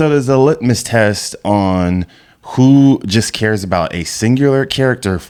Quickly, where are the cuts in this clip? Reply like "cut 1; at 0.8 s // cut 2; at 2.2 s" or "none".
none